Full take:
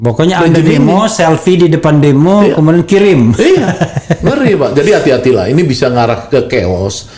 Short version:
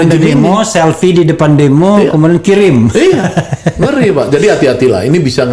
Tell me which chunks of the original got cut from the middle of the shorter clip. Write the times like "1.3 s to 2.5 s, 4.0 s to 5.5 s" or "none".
none